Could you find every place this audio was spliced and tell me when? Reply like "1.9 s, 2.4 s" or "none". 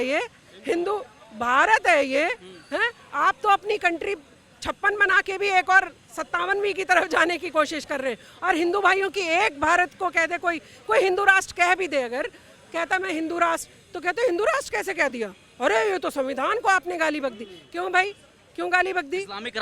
none